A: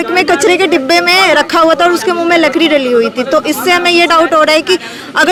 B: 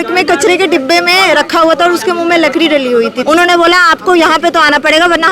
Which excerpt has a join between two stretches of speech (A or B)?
B